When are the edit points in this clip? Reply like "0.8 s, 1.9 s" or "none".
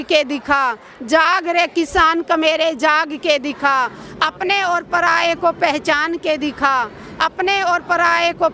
none

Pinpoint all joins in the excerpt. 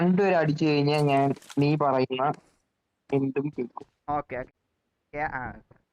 4.5 s

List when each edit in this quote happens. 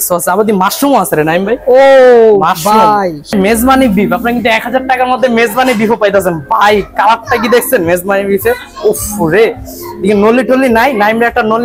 3.3 s

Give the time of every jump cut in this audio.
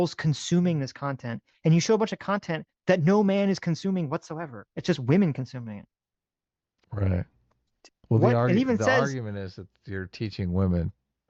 none

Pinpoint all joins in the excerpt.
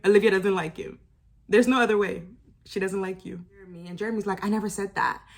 3.8 s

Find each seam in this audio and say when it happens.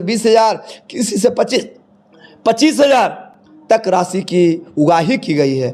none

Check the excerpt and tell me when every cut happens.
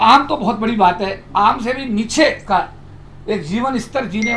none

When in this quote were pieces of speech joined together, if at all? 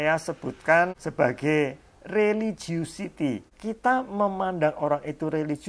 1.0 s, 3.5 s

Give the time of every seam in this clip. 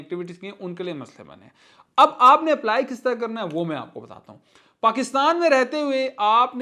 none

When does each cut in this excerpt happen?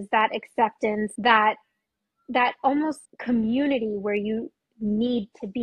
1.1 s, 3.1 s

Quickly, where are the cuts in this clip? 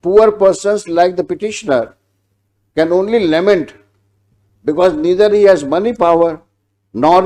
none

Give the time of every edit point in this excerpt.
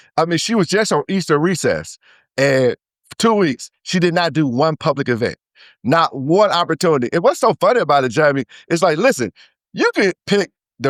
none

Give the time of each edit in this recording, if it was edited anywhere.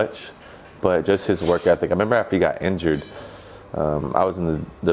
none

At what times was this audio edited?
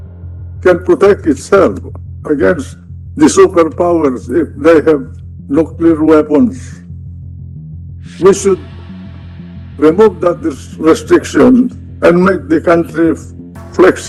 none

